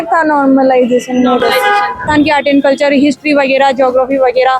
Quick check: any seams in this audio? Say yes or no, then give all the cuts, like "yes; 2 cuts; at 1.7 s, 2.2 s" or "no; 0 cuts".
yes; 1 cut; at 2.1 s